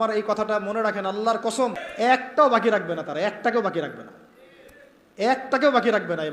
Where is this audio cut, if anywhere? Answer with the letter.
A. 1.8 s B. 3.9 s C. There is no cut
A